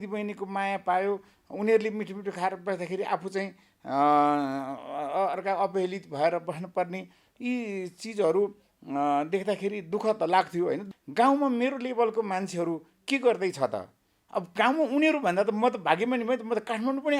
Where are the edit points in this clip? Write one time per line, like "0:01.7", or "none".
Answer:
0:10.8